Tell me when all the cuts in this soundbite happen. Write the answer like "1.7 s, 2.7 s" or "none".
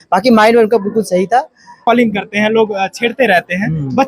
1.8 s